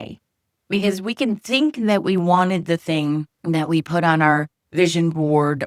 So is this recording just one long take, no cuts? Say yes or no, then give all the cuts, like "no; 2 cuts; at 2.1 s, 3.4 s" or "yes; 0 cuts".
no; 1 cut; at 3.3 s